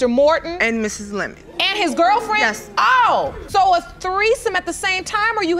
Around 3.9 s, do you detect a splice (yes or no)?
no